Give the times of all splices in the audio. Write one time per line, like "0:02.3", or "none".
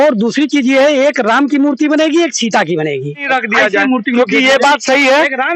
0:03.2